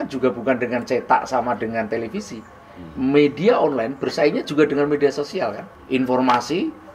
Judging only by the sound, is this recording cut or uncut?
cut